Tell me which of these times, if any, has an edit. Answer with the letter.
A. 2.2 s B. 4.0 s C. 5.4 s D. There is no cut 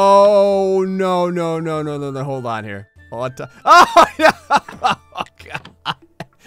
D